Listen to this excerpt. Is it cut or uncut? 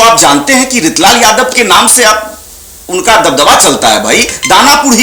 uncut